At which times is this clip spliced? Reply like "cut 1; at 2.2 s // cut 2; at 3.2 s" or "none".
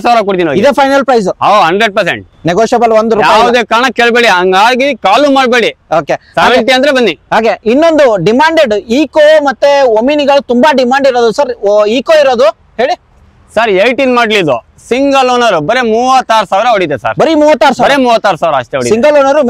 none